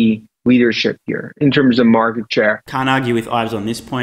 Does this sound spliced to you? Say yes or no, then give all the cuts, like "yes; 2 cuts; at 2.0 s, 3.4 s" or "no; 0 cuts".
no; 0 cuts